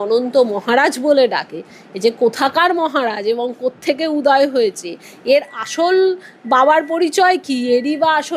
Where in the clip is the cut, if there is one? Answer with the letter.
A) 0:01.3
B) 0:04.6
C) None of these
C